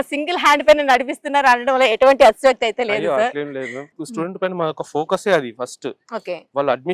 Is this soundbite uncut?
no; 1 cut; at 4.0 s

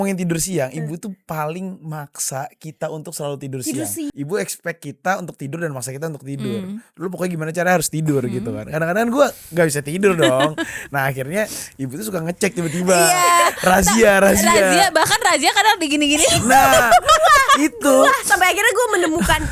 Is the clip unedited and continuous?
no; 1 cut; at 4.1 s

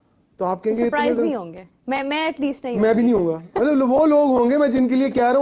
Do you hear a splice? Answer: no; 0 cuts

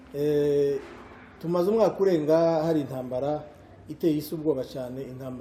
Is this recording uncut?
yes; 0 cuts

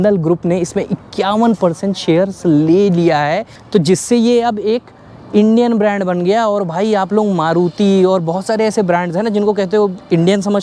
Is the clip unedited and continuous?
yes; 0 cuts

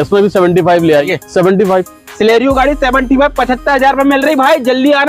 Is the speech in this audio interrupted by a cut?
yes; 1 cut; at 1.0 s

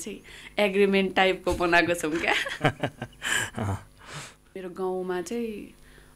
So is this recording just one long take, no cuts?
no; 1 cut; at 4.6 s

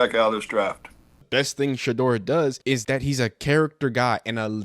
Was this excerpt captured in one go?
no; 2 cuts; at 1.2 s, 2.7 s

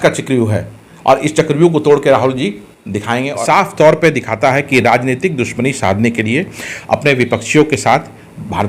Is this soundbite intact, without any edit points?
no; 1 cut; at 3.3 s

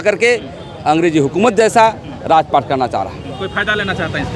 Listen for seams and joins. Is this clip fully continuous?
yes; 0 cuts

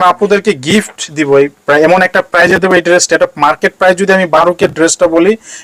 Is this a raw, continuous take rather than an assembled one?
yes; 0 cuts

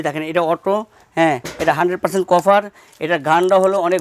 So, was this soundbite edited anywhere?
no; 0 cuts

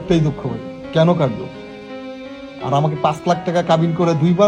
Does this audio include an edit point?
no; 0 cuts

